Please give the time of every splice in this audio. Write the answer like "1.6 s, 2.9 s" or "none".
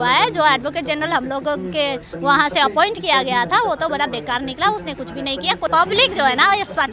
5.7 s